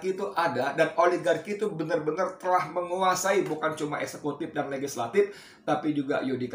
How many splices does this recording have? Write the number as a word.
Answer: zero